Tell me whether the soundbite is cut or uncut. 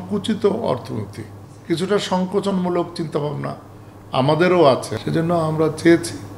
uncut